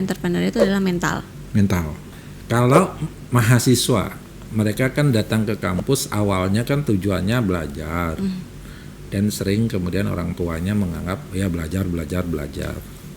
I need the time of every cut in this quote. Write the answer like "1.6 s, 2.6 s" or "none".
2.2 s